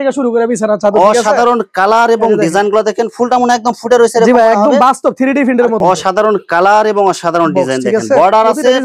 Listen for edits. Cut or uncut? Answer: cut